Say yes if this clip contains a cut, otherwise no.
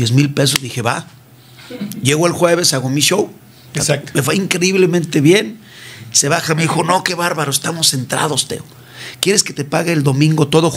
no